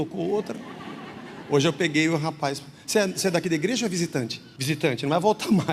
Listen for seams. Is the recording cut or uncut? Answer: cut